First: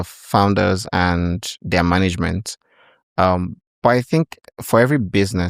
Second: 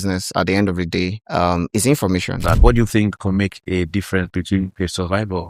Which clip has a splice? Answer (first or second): second